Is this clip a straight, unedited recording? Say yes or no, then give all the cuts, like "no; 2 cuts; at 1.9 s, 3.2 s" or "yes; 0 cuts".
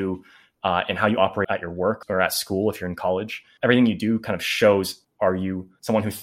no; 3 cuts; at 1.8 s, 3.5 s, 5.4 s